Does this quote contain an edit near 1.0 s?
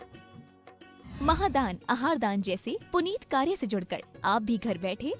yes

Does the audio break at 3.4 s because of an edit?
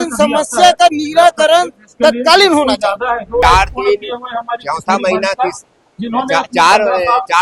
yes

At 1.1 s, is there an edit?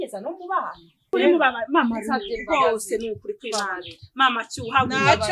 yes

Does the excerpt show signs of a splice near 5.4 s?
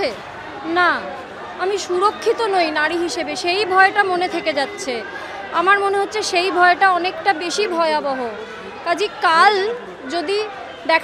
no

